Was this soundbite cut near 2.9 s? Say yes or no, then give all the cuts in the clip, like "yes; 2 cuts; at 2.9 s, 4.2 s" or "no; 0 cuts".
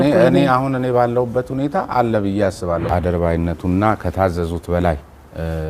yes; 1 cut; at 2.9 s